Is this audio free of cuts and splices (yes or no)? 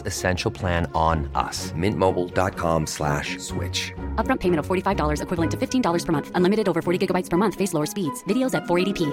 yes